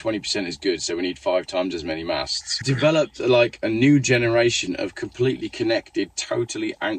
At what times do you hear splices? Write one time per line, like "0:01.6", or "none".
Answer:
0:02.6